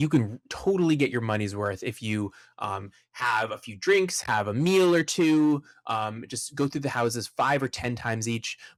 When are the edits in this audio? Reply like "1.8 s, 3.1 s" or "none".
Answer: none